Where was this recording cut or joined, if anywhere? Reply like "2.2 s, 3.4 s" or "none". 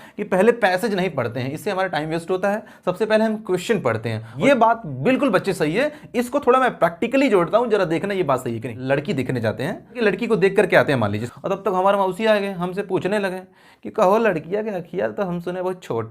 4.3 s, 8.7 s, 10.0 s, 11.2 s